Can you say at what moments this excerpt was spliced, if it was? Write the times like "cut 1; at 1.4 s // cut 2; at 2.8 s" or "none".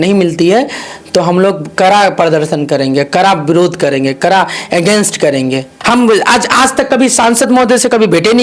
cut 1; at 5.7 s